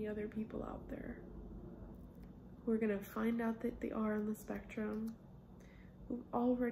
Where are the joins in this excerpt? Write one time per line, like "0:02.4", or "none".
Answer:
0:01.8